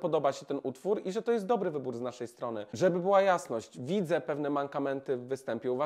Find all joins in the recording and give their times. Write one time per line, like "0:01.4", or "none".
0:02.6